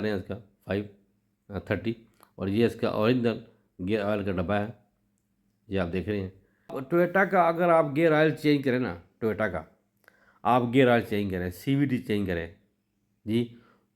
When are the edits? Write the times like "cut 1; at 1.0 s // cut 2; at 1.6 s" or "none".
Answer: cut 1; at 6.8 s